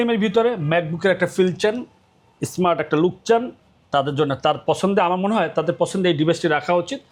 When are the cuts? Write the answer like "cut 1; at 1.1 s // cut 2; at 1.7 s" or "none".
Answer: none